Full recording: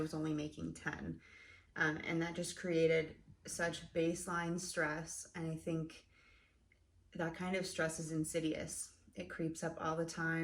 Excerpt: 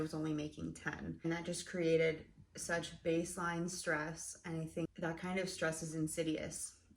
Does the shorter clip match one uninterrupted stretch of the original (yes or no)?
no